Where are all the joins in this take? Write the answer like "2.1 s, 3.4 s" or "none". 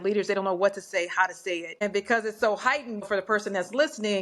1.8 s, 3.1 s